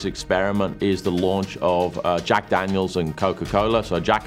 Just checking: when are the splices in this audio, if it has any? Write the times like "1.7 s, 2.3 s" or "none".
none